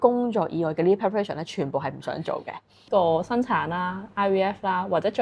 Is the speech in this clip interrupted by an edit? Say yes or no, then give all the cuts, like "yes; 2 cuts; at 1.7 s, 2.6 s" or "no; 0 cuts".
yes; 1 cut; at 2.9 s